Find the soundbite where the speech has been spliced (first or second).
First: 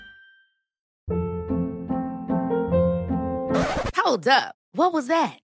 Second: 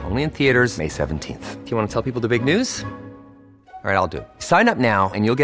first